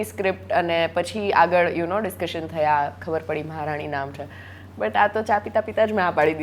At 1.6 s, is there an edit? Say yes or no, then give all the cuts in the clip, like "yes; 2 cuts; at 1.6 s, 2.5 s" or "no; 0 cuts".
no; 0 cuts